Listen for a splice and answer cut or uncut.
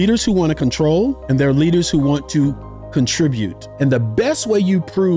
cut